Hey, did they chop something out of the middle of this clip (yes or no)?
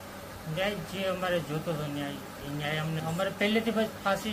yes